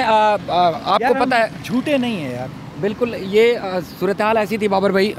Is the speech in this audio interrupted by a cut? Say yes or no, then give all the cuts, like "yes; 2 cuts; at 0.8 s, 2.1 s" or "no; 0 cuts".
no; 0 cuts